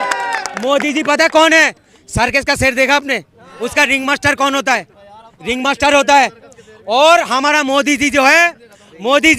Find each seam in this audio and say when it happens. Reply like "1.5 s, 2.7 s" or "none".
none